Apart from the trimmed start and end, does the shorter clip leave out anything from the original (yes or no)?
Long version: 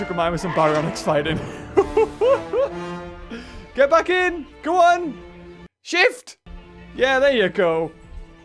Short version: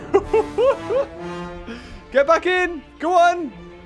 no